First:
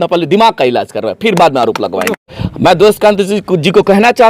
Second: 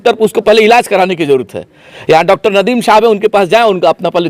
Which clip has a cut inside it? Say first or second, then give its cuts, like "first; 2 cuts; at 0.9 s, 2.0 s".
first; 1 cut; at 2.1 s